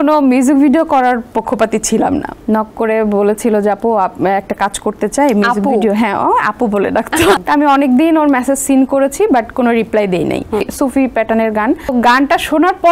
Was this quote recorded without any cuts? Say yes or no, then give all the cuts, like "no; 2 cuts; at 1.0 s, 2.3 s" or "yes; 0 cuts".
no; 4 cuts; at 2.3 s, 7.4 s, 10.7 s, 11.9 s